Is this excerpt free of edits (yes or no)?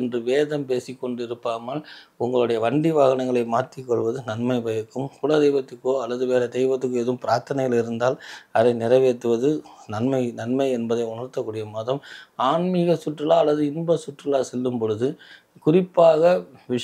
yes